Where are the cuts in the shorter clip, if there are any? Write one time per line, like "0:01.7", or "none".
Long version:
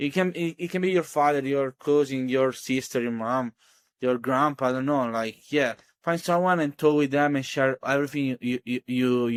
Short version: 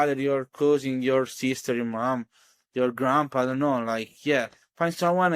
none